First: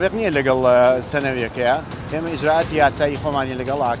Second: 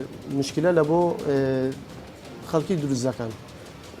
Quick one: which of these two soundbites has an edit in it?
first; 1 cut; at 2.0 s

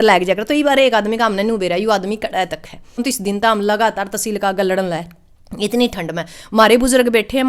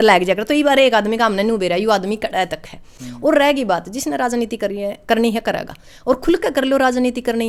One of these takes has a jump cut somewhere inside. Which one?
first; 1 cut; at 3.0 s

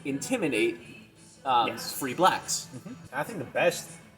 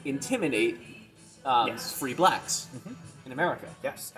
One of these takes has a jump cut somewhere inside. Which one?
first; 1 cut; at 3.0 s

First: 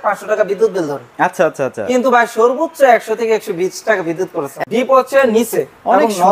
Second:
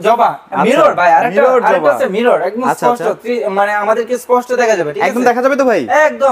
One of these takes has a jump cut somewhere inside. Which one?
first; 1 cut; at 4.4 s

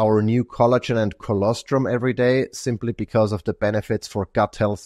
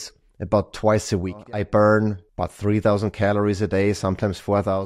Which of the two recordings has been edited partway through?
second; 2 cuts; at 1.4 s, 2.2 s

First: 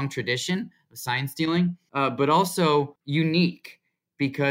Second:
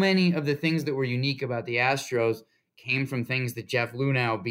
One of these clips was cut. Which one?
first; 2 cuts; at 1.8 s, 3.0 s

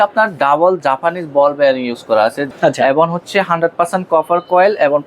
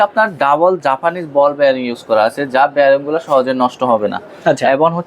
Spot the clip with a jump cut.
first; 1 cut; at 2.4 s

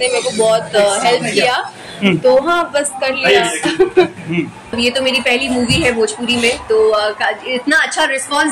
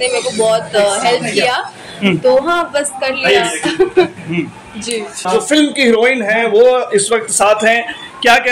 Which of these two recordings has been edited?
first; 1 cut; at 4.8 s

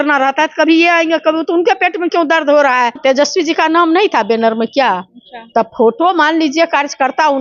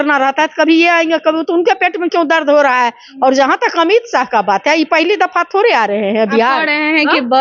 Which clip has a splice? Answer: first; 1 cut; at 3.0 s

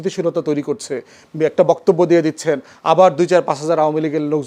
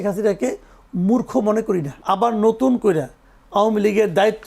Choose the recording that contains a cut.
second; 1 cut; at 1.9 s

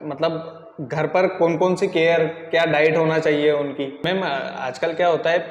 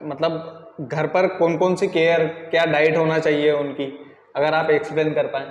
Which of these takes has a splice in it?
first; 1 cut; at 4.0 s

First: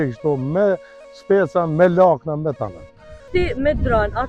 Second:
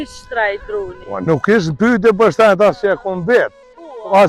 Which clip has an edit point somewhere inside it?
first; 1 cut; at 3.3 s

